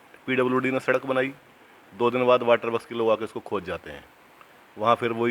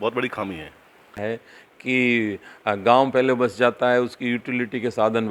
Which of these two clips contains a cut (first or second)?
second